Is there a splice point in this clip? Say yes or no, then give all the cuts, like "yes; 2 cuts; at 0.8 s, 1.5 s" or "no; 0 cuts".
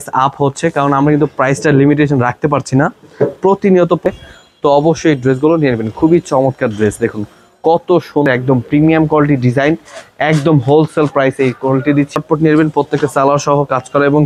yes; 3 cuts; at 4.1 s, 8.3 s, 12.1 s